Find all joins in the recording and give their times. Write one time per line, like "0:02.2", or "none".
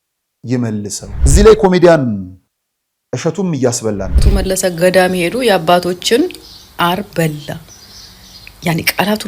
0:01.0
0:04.2

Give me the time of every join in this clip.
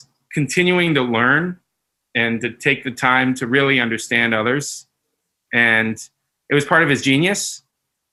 none

